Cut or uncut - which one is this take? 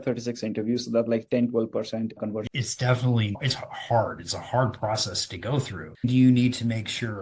cut